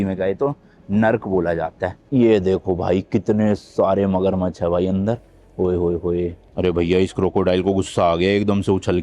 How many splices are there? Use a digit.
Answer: 2